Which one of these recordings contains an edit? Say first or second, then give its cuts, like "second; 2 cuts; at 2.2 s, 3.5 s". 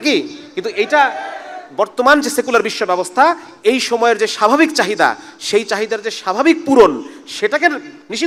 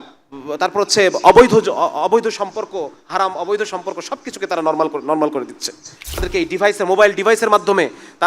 second; 1 cut; at 6.3 s